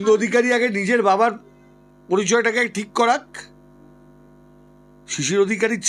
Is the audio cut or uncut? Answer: uncut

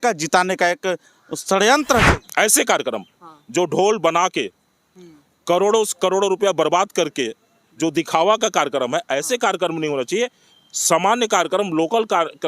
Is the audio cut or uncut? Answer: cut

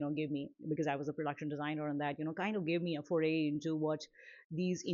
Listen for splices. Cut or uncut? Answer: uncut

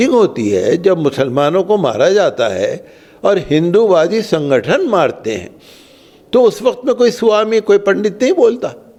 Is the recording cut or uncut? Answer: uncut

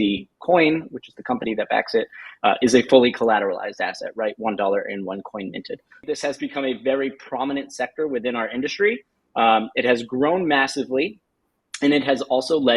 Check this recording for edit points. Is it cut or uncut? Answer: cut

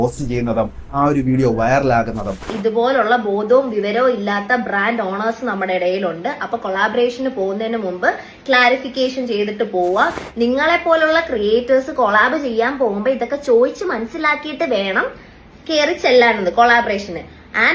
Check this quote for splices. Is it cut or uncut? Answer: cut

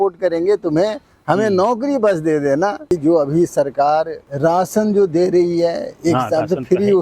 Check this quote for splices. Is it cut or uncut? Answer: cut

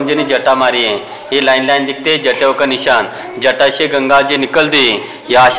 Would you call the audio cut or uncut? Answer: uncut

